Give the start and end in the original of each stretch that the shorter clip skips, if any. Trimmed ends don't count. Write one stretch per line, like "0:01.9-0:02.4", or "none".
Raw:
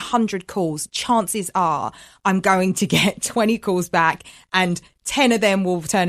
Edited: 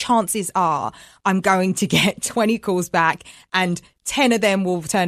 none